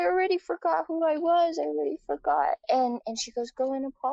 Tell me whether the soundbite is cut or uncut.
cut